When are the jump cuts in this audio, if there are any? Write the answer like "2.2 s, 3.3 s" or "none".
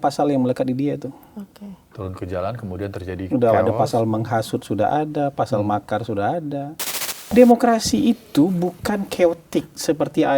7.3 s